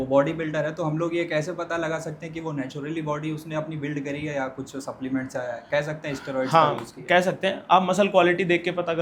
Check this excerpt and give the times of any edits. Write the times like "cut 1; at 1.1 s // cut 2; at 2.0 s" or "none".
none